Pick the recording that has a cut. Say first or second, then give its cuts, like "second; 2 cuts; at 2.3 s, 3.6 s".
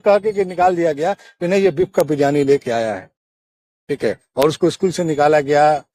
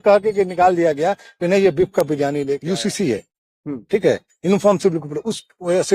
second; 1 cut; at 2.6 s